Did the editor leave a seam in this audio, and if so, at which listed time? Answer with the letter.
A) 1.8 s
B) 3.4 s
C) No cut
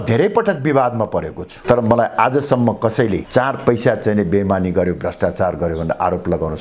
C